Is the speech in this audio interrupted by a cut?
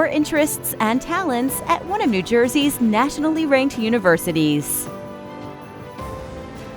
yes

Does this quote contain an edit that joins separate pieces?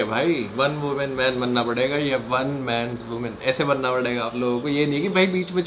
no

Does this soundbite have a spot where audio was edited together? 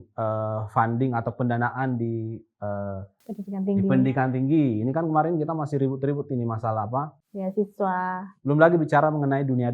yes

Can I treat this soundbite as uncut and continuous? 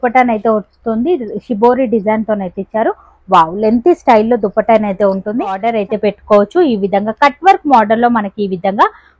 no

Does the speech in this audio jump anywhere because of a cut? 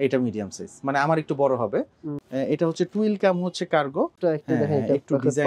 yes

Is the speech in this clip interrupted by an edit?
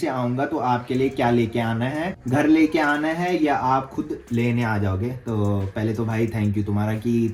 no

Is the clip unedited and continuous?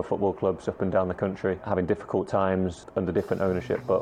no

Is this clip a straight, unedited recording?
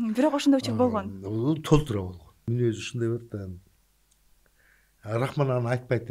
no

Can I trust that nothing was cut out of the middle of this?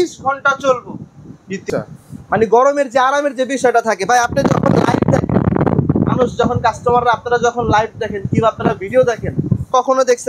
no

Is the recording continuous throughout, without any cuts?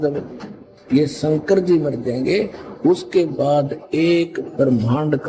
yes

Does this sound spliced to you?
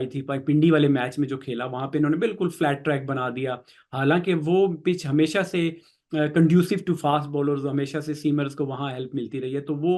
no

